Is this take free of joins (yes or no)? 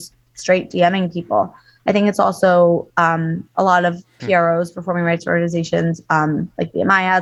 yes